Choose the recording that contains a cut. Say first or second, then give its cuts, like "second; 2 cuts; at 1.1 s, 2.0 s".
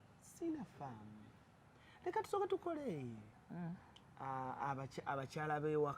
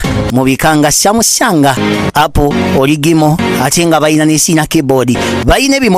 first; 1 cut; at 3.2 s